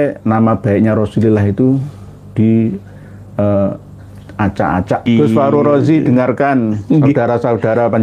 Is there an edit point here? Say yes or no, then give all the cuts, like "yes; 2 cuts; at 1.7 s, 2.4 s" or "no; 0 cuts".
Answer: yes; 1 cut; at 5.1 s